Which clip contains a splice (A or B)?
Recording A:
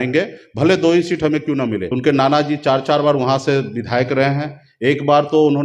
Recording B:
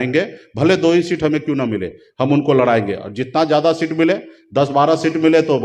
A